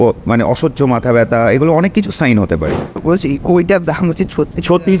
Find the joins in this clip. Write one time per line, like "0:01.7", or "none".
0:03.0